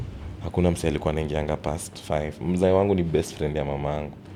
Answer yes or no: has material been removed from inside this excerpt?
no